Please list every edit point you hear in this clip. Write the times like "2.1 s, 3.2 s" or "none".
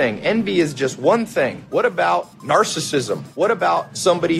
1.6 s, 3.5 s